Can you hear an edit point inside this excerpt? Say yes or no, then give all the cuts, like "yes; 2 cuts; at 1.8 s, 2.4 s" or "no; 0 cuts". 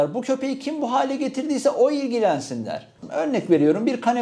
yes; 1 cut; at 2.9 s